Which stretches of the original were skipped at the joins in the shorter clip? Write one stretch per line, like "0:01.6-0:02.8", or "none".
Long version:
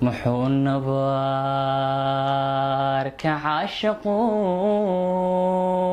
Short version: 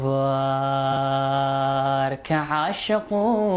0:01.8-0:01.9